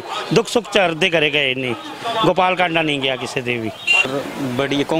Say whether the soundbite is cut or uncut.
cut